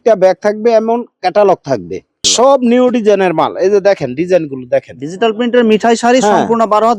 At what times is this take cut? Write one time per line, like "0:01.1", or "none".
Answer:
0:02.3